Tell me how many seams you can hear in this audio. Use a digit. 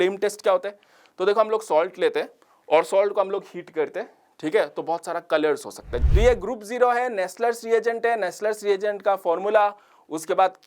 1